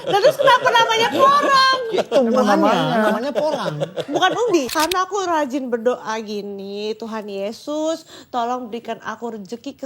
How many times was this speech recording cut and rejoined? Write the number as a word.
one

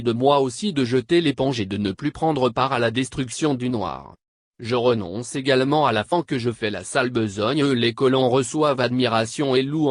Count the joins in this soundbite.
zero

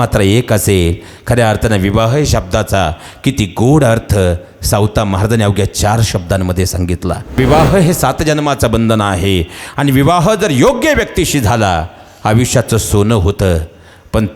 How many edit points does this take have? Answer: one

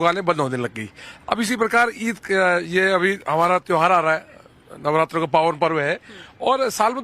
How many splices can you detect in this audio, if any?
one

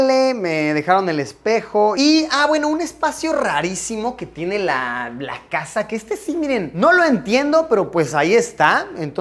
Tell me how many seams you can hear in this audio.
one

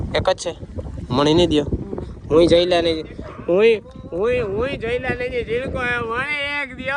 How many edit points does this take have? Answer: zero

